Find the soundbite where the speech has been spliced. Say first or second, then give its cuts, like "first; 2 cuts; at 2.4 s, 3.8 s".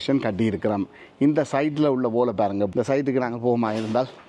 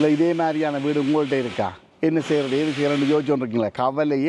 first; 1 cut; at 2.7 s